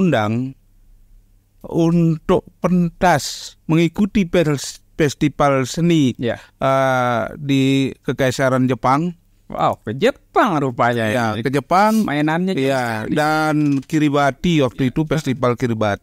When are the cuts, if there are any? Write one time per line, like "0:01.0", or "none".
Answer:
none